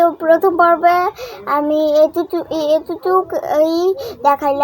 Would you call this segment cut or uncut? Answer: uncut